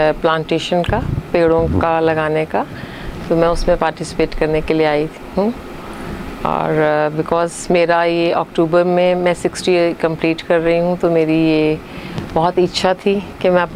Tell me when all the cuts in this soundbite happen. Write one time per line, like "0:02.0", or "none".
none